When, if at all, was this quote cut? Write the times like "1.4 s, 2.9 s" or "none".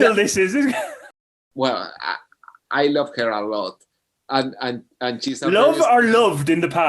1.0 s